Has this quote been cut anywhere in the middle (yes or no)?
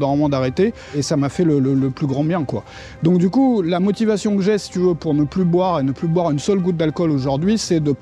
yes